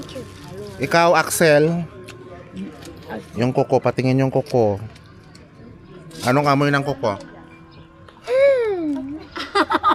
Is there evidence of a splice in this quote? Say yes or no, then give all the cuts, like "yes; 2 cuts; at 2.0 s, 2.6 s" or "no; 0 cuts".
no; 0 cuts